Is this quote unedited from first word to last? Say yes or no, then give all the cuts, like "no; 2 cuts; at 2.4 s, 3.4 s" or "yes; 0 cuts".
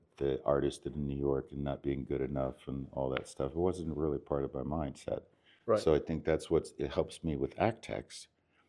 yes; 0 cuts